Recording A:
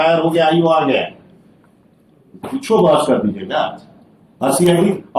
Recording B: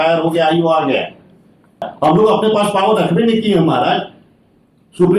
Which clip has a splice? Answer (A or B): B